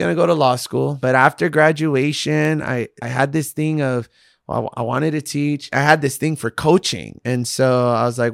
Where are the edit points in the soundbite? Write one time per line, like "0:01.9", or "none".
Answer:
0:01.0
0:03.0
0:05.7